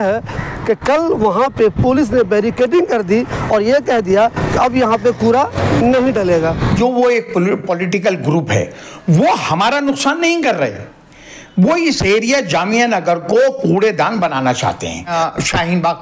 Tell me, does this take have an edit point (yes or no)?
yes